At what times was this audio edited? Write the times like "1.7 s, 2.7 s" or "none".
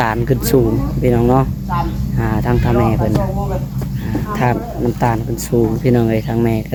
none